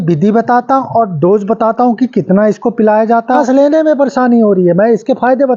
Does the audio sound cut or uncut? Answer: cut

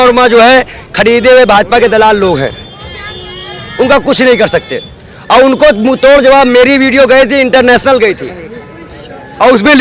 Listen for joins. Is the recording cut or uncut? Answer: uncut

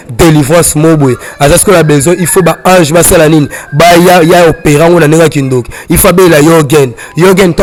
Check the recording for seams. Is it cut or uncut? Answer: uncut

